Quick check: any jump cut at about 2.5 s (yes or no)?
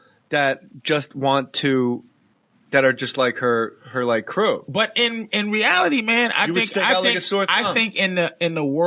yes